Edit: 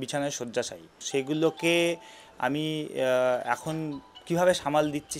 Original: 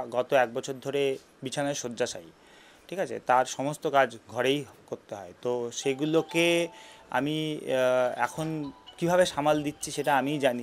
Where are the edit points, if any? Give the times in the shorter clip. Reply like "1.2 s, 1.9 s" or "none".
1.0 s

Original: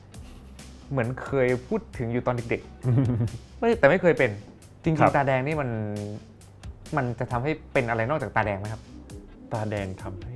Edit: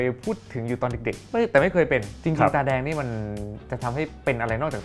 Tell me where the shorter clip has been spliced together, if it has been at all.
1.2 s, 2.1 s, 3.7 s

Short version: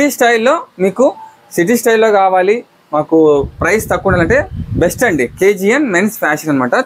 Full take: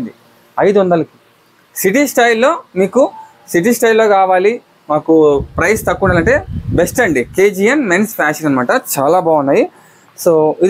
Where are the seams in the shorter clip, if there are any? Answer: none

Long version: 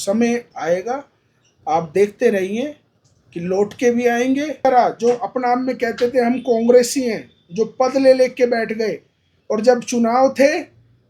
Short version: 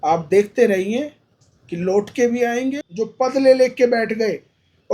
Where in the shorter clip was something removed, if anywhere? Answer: 2.8 s

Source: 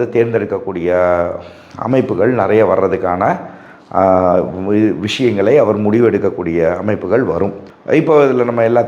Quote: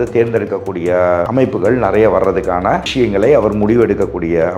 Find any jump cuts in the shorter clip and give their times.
1.3 s, 2.9 s

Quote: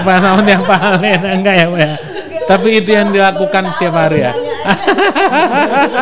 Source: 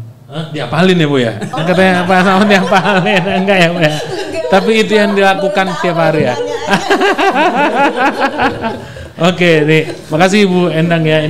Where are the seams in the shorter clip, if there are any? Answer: none

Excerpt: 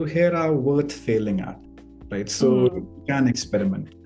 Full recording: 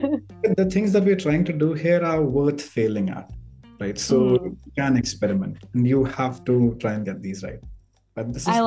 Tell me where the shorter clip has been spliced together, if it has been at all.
none

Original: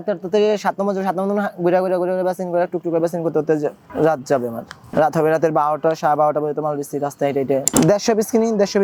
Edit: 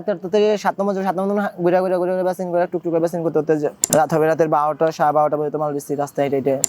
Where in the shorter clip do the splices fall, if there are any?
3.8 s

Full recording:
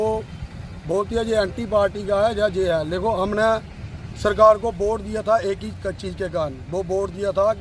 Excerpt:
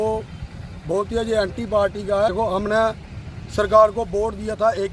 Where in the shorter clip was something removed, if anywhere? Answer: 2.3 s

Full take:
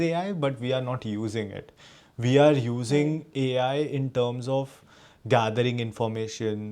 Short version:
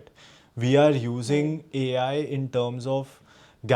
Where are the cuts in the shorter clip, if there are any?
none

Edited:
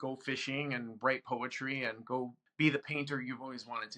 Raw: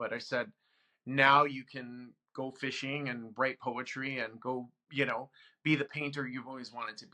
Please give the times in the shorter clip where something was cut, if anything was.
2.4 s

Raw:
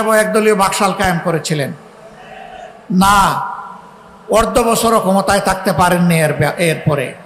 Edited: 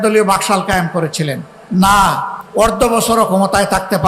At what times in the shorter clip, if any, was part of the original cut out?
1.5 s, 2.3 s

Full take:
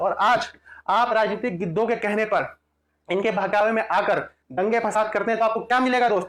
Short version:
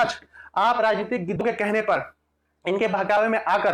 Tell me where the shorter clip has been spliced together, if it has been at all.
1.4 s

